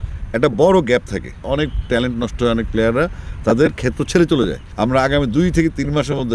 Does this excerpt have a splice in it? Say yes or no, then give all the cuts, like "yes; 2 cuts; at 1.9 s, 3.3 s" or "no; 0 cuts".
yes; 2 cuts; at 1.4 s, 4.6 s